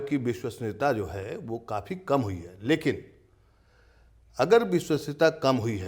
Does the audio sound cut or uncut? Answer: uncut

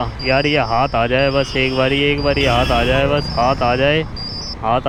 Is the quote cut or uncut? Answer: uncut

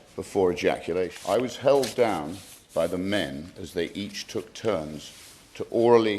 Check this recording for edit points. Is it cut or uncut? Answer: cut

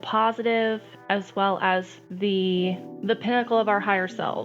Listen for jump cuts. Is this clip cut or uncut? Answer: cut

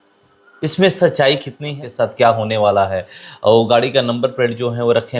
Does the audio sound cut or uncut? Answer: cut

